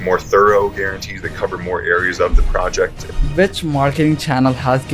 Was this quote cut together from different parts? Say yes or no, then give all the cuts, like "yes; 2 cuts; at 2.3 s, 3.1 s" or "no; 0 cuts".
yes; 1 cut; at 3.0 s